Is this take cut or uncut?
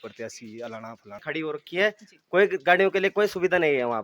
cut